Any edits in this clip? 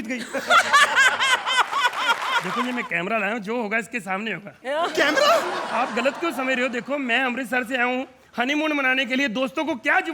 yes; 1 cut; at 2.5 s

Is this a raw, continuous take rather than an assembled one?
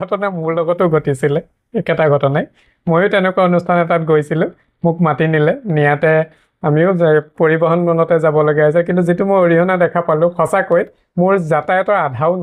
yes; 0 cuts

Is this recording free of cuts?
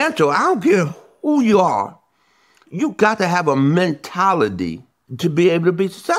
yes; 0 cuts

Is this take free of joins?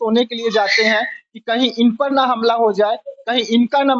yes; 0 cuts

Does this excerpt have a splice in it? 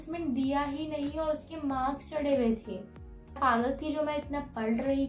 yes; 1 cut; at 3.4 s

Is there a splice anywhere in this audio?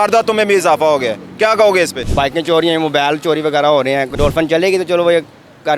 yes; 2 cuts; at 2.0 s, 4.1 s

